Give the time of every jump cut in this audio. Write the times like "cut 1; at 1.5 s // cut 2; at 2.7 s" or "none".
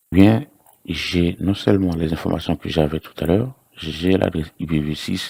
none